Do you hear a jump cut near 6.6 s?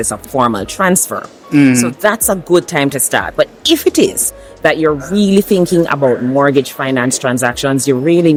no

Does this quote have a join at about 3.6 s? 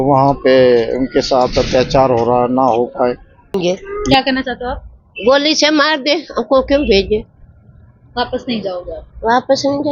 yes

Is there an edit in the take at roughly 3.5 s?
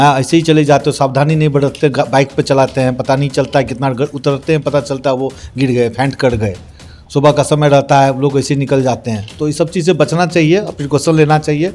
no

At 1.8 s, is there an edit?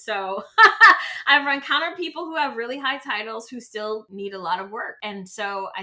no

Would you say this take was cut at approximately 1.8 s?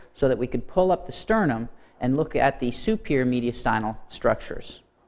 no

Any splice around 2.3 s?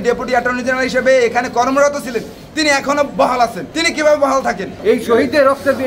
no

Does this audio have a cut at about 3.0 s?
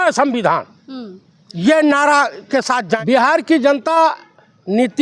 yes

